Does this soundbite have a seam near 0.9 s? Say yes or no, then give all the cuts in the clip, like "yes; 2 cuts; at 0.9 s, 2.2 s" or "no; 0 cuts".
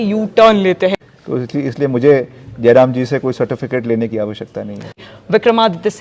yes; 2 cuts; at 0.9 s, 5.0 s